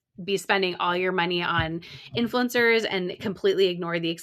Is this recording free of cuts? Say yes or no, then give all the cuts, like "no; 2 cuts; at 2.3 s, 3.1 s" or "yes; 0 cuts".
yes; 0 cuts